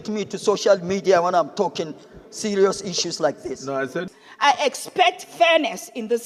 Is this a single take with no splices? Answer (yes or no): no